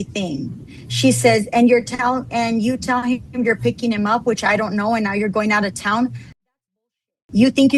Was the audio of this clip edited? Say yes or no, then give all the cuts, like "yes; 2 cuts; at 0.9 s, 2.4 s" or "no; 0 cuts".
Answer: no; 0 cuts